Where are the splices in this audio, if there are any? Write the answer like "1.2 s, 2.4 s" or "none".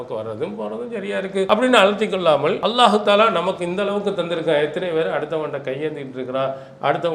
1.5 s, 2.6 s